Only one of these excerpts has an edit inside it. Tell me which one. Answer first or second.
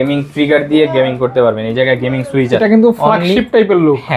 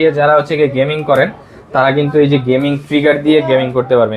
first